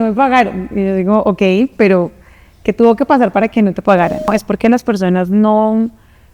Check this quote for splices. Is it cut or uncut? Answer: cut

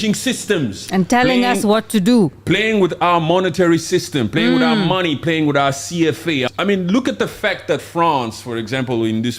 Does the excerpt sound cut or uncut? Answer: cut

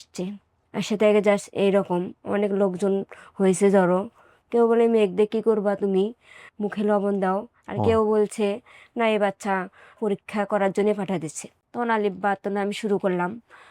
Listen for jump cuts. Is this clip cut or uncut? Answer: cut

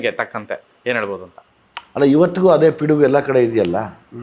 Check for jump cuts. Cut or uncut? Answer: uncut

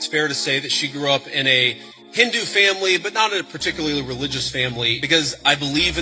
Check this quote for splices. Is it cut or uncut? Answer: cut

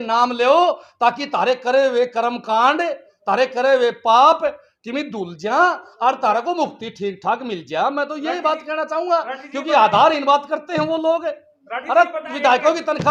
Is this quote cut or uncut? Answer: uncut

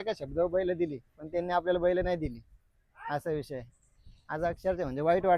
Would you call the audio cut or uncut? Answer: uncut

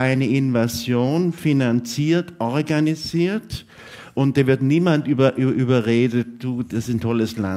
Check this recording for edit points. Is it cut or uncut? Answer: cut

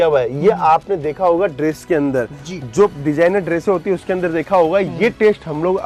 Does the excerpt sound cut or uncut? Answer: uncut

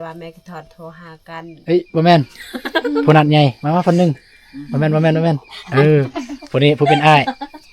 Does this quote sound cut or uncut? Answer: cut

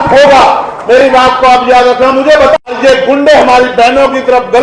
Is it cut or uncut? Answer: cut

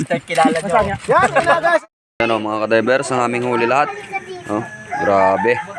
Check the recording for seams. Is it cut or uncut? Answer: cut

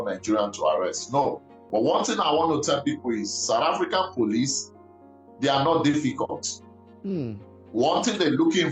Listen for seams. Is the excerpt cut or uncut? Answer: cut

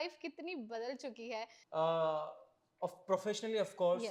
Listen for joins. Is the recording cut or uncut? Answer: uncut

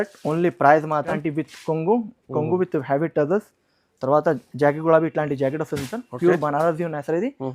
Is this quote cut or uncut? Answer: cut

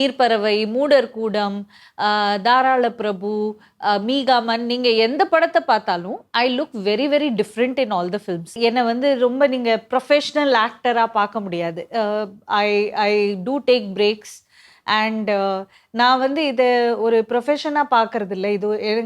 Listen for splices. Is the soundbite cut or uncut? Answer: cut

